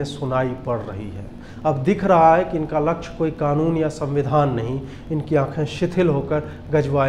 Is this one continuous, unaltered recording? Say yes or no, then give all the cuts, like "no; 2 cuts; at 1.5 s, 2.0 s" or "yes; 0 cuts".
yes; 0 cuts